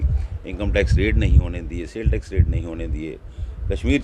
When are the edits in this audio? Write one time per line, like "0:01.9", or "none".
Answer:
none